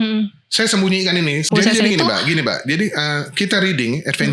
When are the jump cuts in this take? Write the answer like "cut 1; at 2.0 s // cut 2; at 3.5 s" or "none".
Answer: cut 1; at 1.5 s